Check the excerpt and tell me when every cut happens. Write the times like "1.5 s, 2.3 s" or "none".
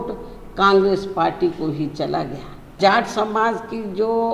2.8 s